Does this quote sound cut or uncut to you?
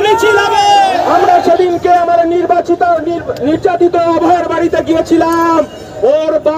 cut